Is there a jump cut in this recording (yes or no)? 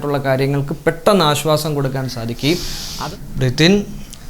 yes